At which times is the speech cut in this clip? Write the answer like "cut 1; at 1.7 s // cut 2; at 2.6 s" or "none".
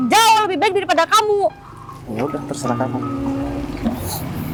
none